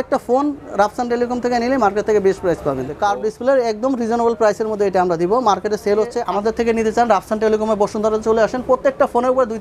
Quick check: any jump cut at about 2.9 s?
yes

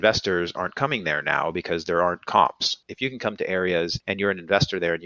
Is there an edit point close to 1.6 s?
no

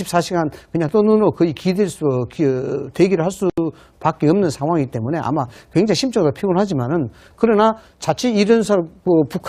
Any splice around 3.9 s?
no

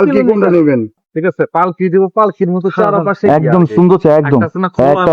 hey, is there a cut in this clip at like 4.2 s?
no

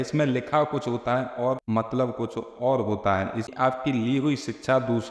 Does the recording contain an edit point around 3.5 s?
yes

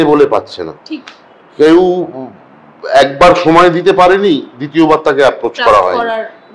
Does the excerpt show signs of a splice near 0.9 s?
no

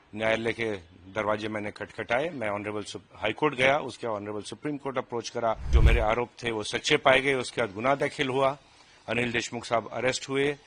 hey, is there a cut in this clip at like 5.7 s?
yes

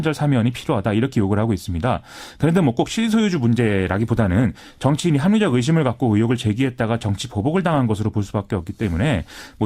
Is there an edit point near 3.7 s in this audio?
yes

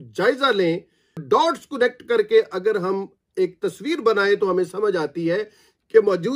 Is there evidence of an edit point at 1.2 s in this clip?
yes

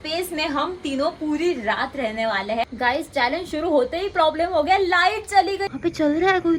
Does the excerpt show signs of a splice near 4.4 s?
no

